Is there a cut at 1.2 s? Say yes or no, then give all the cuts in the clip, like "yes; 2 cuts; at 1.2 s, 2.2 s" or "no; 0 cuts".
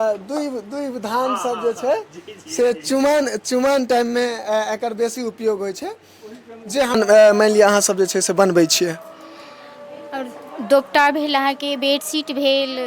no; 1 cut; at 6.9 s